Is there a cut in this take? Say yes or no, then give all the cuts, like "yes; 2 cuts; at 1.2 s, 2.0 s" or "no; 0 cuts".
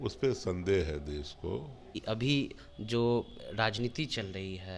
yes; 1 cut; at 2.0 s